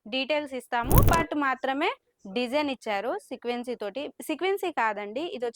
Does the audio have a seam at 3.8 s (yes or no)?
no